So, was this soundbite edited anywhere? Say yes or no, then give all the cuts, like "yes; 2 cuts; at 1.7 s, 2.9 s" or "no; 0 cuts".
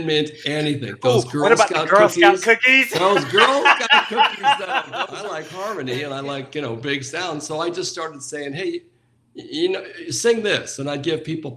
yes; 1 cut; at 5.2 s